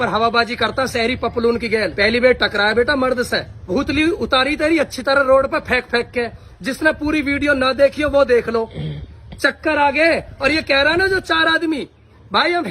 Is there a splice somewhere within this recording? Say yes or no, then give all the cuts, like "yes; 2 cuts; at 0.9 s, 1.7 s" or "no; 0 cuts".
yes; 1 cut; at 3.7 s